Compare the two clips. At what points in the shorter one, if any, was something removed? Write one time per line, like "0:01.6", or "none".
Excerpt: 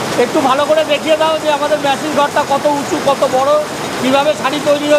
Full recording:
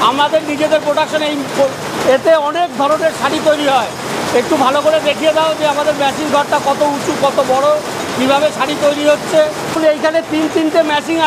none